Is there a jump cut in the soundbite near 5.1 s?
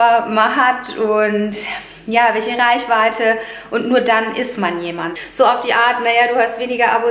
yes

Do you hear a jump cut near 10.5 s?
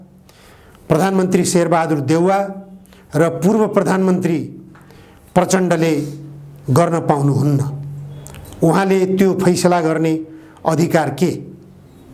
no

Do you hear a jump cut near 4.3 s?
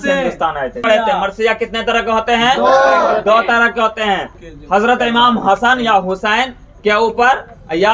yes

